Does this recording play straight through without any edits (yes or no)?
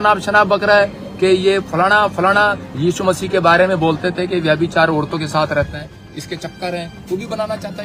yes